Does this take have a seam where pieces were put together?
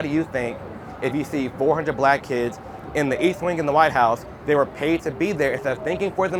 no; 0 cuts

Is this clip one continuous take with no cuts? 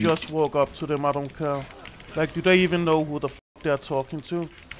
yes; 0 cuts

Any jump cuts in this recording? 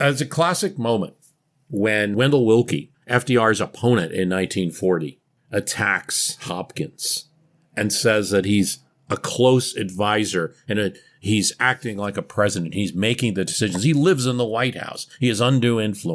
yes; 3 cuts; at 2.1 s, 2.9 s, 5.3 s

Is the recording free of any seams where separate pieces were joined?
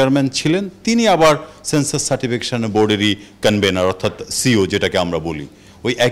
yes; 0 cuts

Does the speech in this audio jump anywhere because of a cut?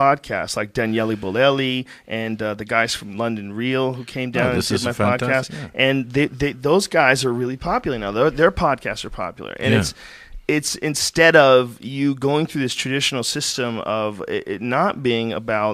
yes; 1 cut; at 6.9 s

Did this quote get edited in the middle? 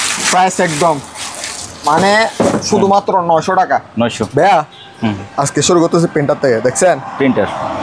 yes; 1 cut; at 4.2 s

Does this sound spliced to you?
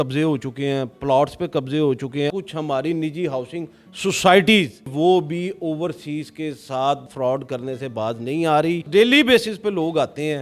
yes; 3 cuts; at 2.3 s, 4.9 s, 8.9 s

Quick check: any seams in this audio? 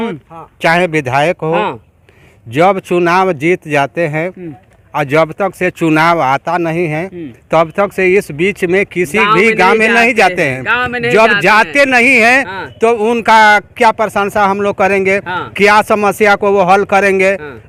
no; 0 cuts

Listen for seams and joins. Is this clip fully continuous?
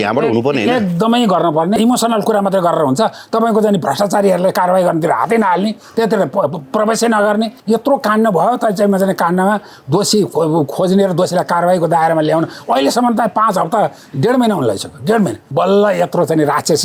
no; 3 cuts; at 1.8 s, 7.6 s, 15.4 s

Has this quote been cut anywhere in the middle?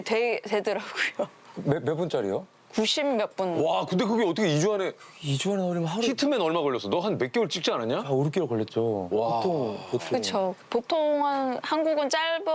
no; 0 cuts

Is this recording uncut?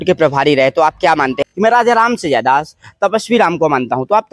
no; 1 cut; at 1.4 s

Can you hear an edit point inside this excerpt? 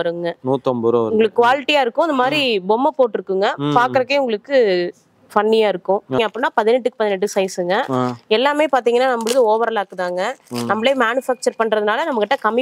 yes; 1 cut; at 6.2 s

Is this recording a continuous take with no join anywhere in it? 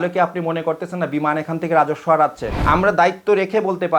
no; 1 cut; at 2.5 s

